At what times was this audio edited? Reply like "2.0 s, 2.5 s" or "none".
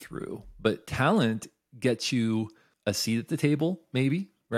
2.6 s

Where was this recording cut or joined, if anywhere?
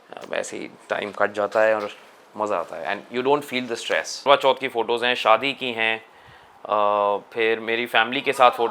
4.2 s

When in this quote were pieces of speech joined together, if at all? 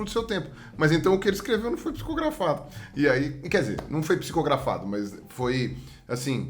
none

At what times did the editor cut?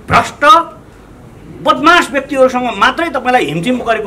none

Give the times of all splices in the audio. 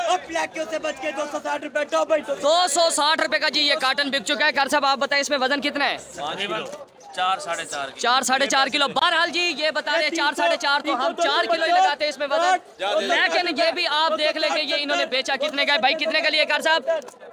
none

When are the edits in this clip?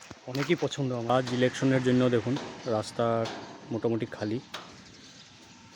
1.1 s

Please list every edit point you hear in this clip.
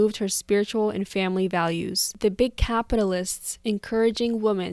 2.0 s

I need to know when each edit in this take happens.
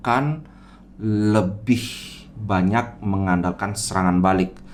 none

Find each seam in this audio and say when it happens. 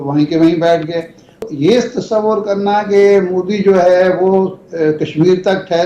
1.5 s

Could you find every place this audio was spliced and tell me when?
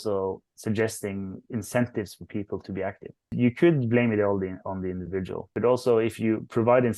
5.5 s

